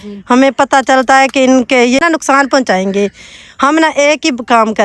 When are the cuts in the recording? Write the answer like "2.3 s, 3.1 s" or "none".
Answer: 2.0 s